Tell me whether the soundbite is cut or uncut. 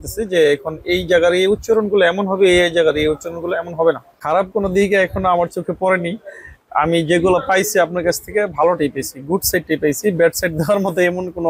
cut